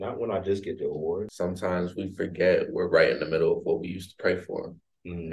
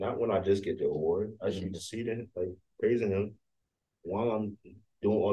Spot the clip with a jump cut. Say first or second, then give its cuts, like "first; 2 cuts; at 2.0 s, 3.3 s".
first; 1 cut; at 1.3 s